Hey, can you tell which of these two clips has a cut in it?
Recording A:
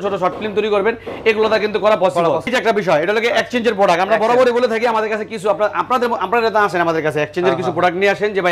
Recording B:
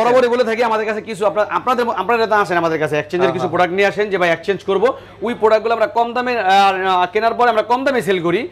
A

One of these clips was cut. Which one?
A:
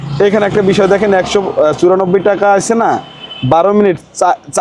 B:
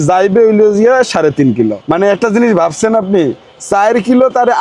B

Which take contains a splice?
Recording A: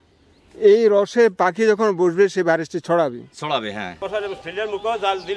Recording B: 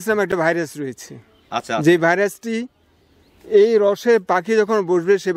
A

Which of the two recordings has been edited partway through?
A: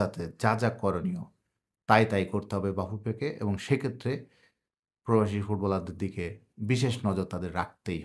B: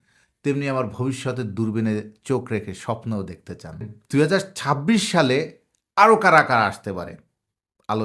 B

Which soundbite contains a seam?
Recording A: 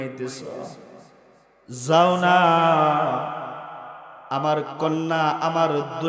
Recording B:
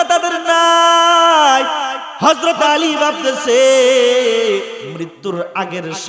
B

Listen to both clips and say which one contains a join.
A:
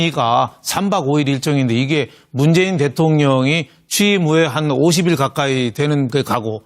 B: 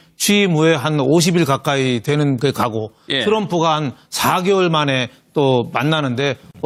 A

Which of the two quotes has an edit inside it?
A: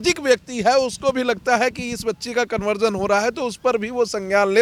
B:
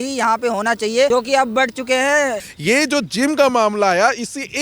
B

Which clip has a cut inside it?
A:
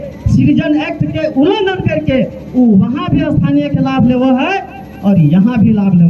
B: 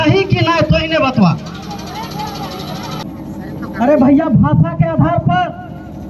B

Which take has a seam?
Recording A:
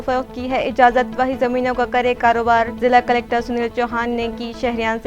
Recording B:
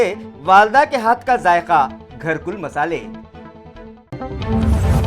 B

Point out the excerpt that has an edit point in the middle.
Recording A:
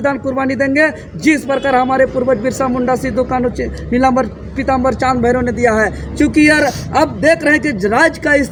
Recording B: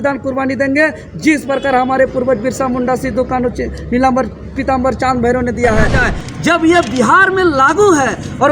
B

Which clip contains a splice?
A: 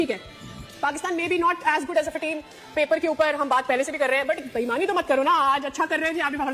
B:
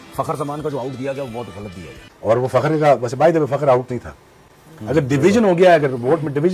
B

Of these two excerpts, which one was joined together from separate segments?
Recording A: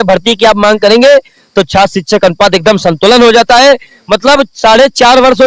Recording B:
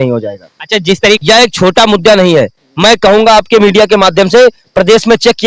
B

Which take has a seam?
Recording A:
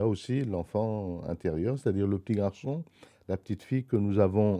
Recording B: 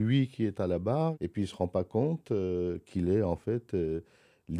B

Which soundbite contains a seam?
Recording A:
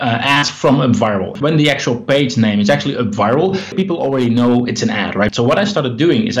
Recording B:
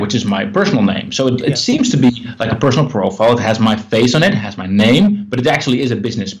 A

